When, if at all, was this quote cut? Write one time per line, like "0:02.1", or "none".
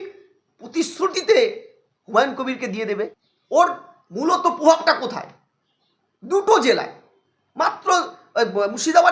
none